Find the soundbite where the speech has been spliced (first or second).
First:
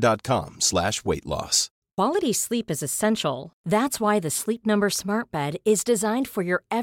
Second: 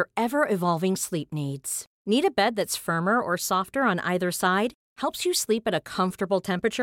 first